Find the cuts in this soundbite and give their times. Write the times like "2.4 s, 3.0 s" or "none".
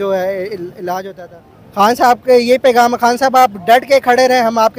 1.2 s